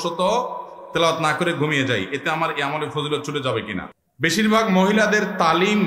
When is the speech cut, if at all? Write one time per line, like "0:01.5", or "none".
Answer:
0:03.9